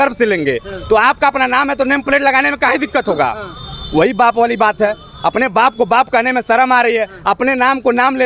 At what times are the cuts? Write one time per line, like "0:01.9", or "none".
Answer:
none